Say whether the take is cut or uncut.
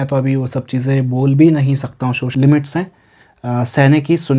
cut